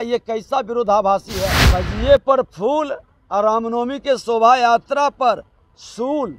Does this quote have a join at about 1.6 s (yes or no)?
yes